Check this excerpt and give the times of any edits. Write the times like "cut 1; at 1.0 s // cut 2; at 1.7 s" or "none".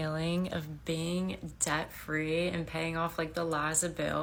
none